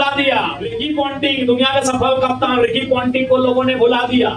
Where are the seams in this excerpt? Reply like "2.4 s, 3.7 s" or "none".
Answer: 0.9 s